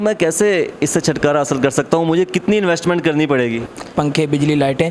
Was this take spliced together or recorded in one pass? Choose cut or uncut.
cut